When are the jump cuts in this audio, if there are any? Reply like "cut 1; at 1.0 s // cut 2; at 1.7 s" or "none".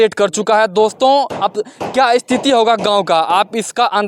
none